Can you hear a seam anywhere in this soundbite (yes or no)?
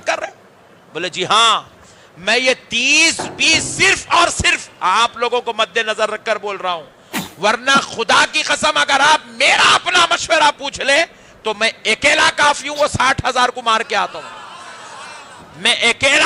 no